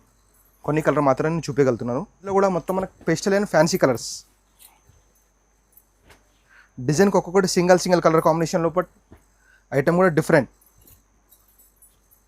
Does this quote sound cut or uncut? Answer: cut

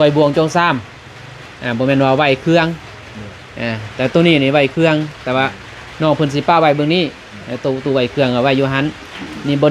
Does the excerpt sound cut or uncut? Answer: uncut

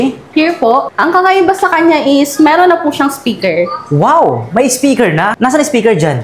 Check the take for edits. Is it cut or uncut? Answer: cut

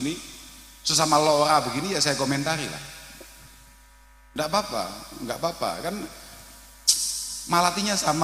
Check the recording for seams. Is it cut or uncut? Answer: uncut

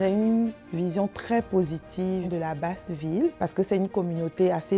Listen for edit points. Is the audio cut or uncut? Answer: cut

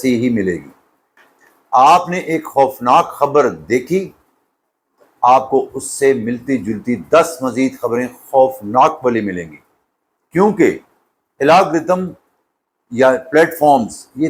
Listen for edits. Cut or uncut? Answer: uncut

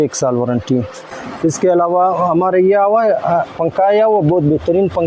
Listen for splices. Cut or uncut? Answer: cut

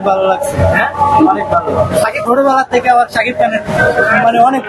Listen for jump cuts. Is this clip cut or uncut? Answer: cut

